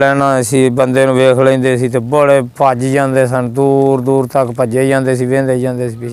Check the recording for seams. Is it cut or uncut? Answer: uncut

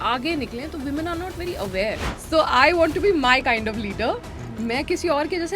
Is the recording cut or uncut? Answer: cut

